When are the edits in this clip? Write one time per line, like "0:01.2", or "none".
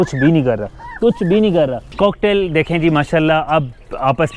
0:01.8